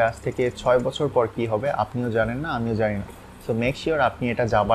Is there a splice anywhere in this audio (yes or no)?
no